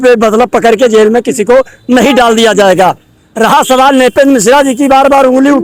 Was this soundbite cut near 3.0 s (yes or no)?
no